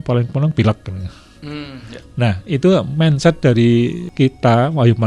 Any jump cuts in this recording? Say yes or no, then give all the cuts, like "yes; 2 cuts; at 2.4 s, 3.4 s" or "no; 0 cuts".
yes; 1 cut; at 4.0 s